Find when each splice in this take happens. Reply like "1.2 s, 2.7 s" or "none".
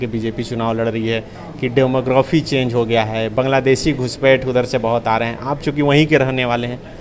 none